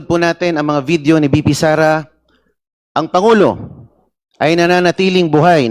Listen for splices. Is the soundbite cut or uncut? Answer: uncut